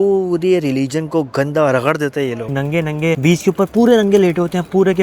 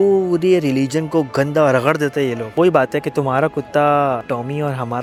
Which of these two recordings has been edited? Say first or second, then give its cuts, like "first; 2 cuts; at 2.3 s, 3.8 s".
first; 1 cut; at 2.5 s